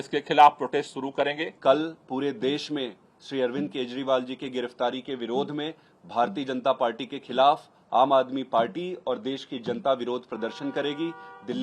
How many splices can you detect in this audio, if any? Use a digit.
0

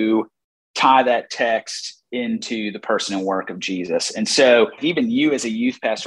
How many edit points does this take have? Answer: 1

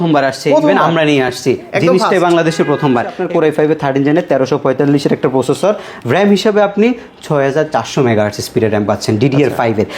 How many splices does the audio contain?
1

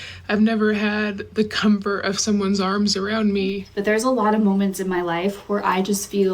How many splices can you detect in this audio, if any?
1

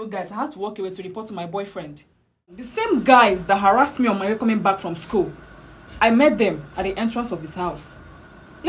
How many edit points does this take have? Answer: 1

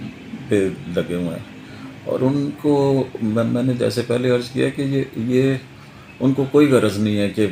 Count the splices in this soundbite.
0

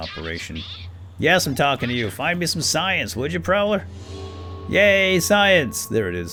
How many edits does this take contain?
0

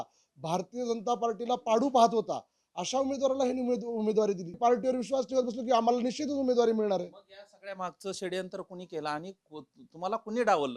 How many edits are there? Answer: 1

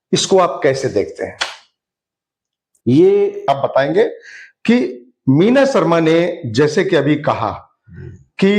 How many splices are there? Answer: 1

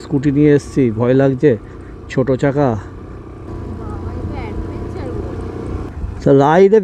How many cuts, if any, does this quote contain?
2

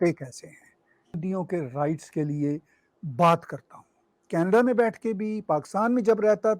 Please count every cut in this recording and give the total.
1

